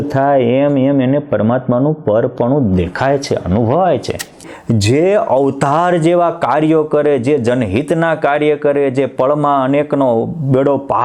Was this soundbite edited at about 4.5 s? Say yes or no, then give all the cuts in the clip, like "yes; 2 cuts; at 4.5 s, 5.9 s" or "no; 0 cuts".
yes; 1 cut; at 4.5 s